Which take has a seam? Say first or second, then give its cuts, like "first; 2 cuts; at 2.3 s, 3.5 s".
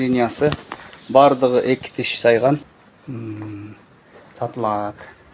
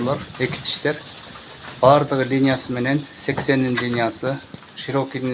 first; 1 cut; at 2.7 s